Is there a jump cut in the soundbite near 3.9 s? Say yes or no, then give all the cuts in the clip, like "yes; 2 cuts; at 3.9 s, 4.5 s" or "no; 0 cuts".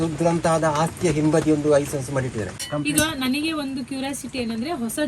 no; 1 cut; at 2.6 s